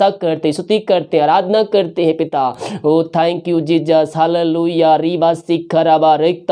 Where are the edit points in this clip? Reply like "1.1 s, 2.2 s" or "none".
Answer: none